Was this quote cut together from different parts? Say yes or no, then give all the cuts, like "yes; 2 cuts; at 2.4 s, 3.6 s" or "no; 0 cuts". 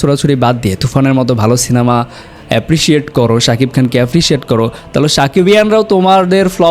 no; 0 cuts